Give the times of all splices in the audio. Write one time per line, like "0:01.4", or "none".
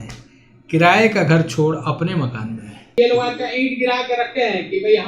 0:02.9